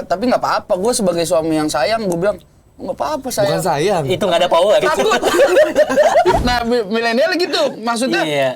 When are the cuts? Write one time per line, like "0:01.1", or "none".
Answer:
0:06.4